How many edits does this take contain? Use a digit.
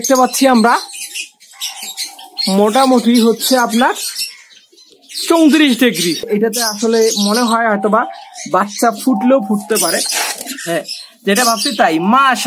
1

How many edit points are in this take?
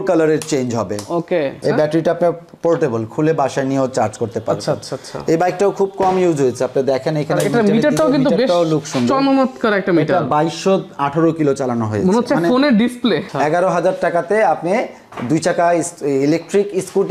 2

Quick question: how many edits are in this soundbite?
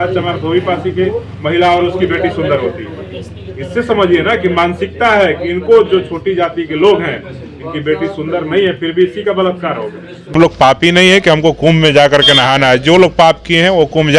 1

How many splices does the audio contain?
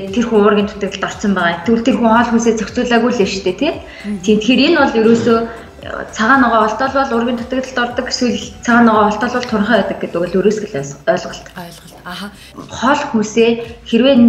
1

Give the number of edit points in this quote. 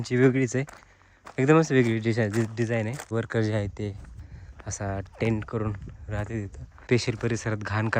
2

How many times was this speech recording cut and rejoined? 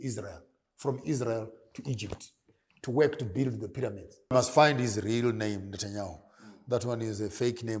1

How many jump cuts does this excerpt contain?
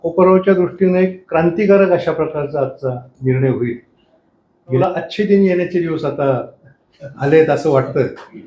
1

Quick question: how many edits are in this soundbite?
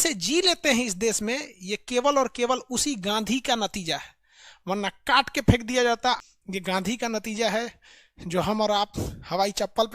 1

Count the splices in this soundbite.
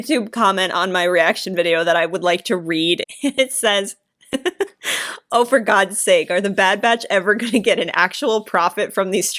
1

